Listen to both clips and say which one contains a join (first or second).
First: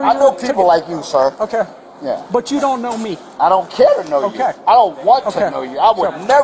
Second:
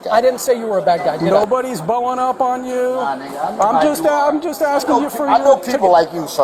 second